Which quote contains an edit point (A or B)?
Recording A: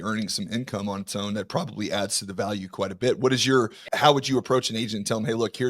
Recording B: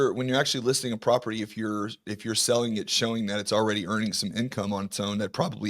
A